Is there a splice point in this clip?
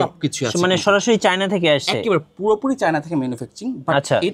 no; 0 cuts

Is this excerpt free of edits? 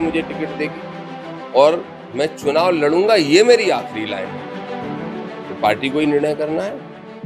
yes; 0 cuts

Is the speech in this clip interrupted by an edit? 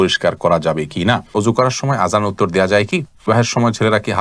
yes; 2 cuts; at 1.3 s, 3.3 s

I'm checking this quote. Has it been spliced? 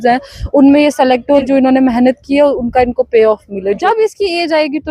yes; 2 cuts; at 1.4 s, 3.8 s

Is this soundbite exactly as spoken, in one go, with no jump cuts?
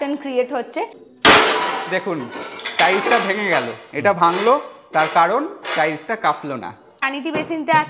no; 2 cuts; at 1.0 s, 7.0 s

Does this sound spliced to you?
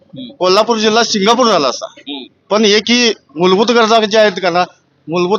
no; 0 cuts

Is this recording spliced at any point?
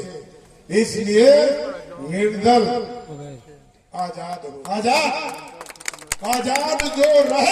yes; 1 cut; at 4.4 s

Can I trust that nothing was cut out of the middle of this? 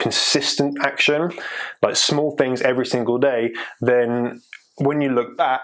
yes; 0 cuts

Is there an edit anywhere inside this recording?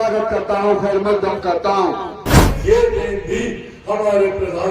yes; 1 cut; at 2.4 s

